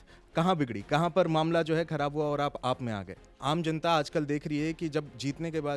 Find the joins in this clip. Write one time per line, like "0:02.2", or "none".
0:03.3